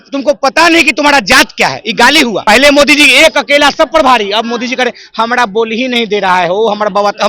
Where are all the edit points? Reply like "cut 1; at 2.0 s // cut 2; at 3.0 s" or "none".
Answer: cut 1; at 2.4 s